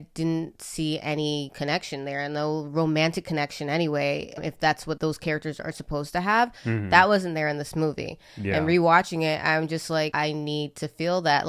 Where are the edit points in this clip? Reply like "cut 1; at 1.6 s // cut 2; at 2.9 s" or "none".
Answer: cut 1; at 4.4 s